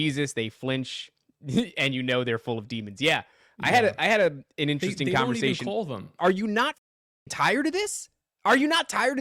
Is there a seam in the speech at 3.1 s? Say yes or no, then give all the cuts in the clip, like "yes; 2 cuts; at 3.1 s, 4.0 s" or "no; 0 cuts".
no; 1 cut; at 6.2 s